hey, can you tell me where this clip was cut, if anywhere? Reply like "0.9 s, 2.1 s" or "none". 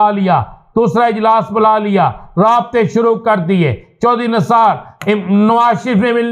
none